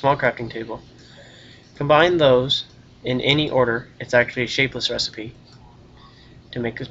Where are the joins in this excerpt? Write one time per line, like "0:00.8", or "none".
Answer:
0:05.1